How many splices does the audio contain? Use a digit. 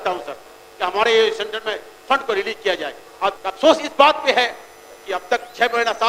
1